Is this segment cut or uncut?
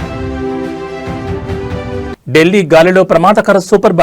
uncut